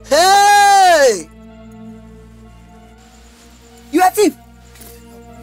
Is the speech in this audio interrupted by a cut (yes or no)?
yes